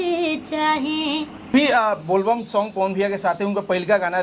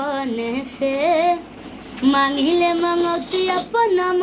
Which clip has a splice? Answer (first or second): first